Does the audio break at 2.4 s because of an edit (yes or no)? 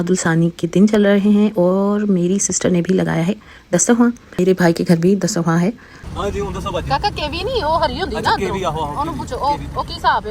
no